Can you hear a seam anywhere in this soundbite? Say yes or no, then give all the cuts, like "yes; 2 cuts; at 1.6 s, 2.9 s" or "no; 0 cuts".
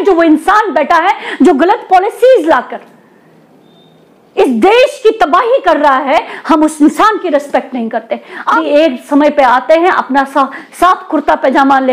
yes; 1 cut; at 8.6 s